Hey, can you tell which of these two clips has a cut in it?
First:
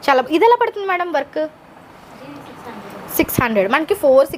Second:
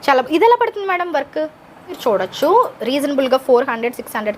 second; 1 cut; at 2.0 s

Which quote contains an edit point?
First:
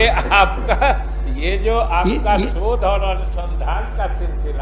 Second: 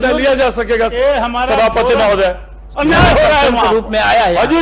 second; 1 cut; at 2.6 s

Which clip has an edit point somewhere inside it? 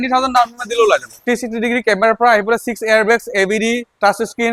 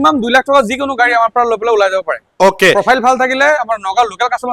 first; 1 cut; at 1.2 s

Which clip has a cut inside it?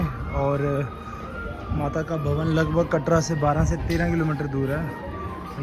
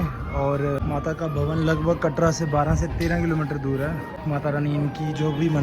second; 2 cuts; at 0.8 s, 4.1 s

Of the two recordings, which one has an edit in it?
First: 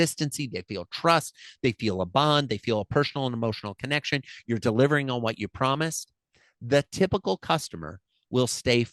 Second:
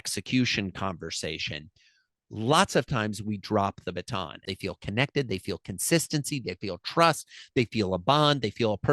second; 1 cut; at 4.4 s

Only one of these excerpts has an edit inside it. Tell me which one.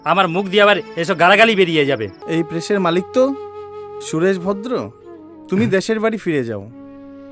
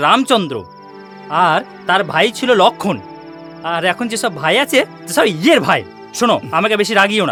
first; 1 cut; at 2.2 s

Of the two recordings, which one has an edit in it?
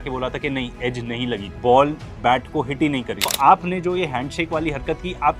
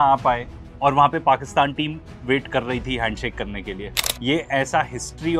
first; 1 cut; at 3.3 s

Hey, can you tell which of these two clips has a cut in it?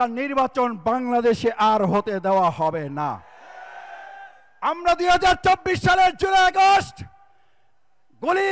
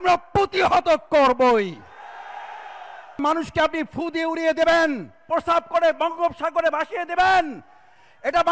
second; 2 cuts; at 3.2 s, 5.2 s

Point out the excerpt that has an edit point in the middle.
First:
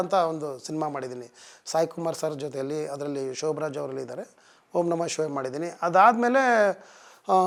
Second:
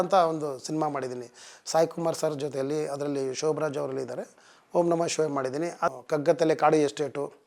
second; 1 cut; at 5.9 s

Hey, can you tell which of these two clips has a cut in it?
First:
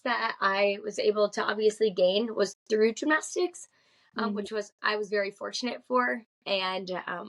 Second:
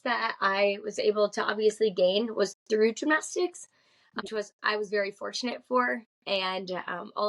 second; 1 cut; at 4.2 s

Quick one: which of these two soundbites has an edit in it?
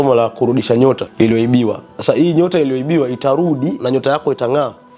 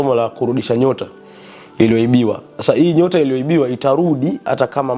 first; 2 cuts; at 1.1 s, 3.8 s

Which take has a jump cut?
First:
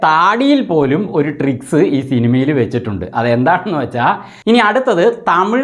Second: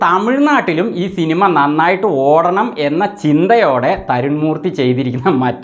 first; 1 cut; at 4.3 s

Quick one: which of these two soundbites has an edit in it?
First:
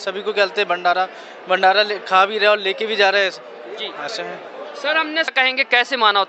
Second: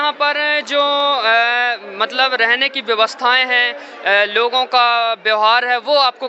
first; 1 cut; at 5.3 s

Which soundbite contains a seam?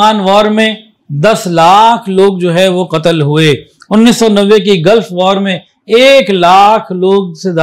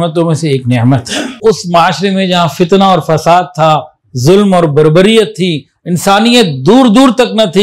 second; 1 cut; at 1.3 s

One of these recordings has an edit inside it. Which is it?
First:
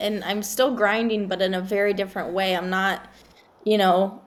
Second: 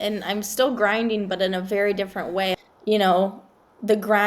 second; 1 cut; at 2.6 s

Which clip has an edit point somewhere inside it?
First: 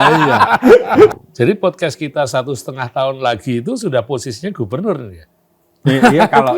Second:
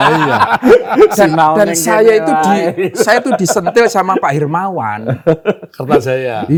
first; 1 cut; at 1.1 s

